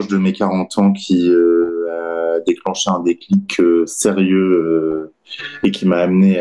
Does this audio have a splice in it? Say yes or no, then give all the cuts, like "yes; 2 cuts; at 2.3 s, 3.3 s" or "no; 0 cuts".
no; 0 cuts